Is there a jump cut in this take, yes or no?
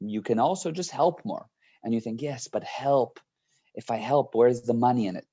no